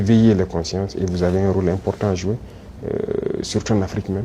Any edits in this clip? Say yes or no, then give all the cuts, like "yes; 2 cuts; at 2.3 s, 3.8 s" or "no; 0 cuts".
yes; 1 cut; at 2.9 s